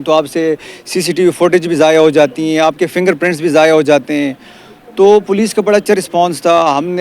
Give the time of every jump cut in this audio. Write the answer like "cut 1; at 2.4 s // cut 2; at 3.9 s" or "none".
none